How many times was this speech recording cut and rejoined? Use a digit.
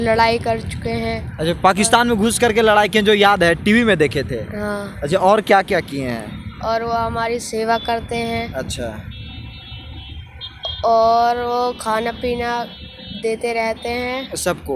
0